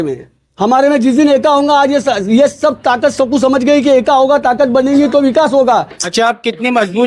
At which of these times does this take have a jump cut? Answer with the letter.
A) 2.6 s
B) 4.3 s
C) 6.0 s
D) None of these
C